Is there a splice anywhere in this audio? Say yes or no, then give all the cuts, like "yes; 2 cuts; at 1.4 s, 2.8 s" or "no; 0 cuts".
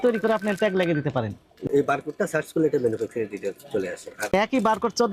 yes; 2 cuts; at 1.7 s, 4.3 s